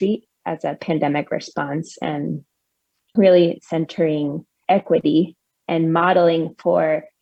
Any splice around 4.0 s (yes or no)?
no